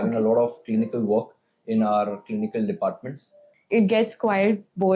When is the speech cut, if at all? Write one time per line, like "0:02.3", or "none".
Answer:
0:03.5